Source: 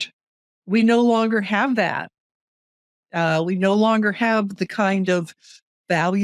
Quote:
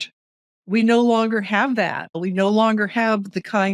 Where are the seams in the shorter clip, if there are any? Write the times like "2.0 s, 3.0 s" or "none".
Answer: 2.2 s

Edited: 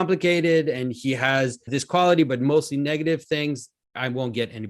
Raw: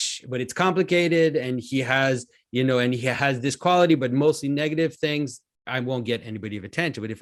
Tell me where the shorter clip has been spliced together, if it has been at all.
1.7 s

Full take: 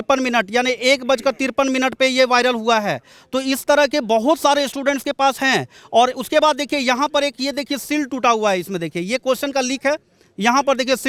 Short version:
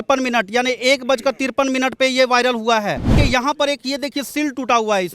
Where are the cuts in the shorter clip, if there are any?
3.1 s

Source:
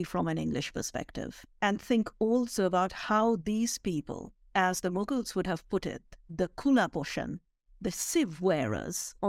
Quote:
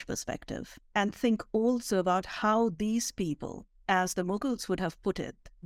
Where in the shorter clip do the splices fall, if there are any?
none

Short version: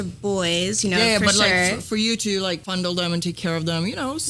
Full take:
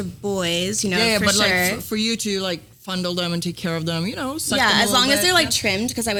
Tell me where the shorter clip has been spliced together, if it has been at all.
2.6 s

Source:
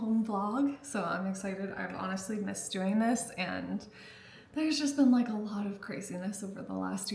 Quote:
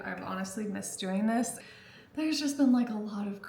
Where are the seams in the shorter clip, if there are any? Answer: 1.7 s

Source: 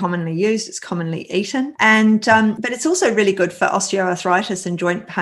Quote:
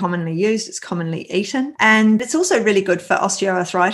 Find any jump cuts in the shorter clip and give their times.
2.2 s

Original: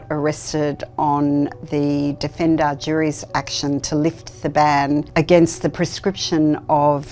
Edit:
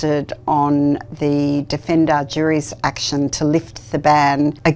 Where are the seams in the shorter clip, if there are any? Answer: none

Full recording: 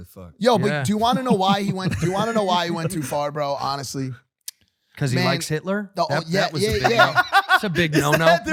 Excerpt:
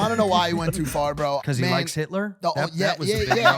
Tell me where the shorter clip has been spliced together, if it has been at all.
1.4 s

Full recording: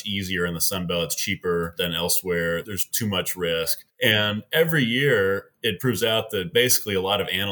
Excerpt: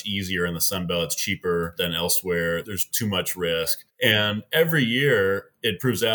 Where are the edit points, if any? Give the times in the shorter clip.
none

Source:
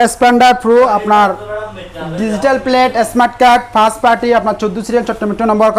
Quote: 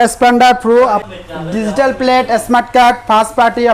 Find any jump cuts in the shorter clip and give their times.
1.0 s

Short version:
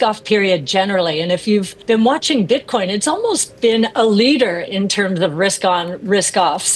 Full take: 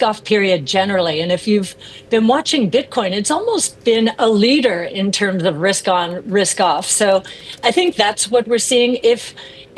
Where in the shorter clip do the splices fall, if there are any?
1.7 s

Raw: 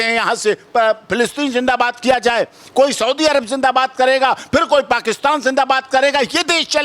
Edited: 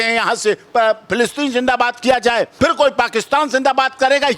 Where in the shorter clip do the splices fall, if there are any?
2.5 s

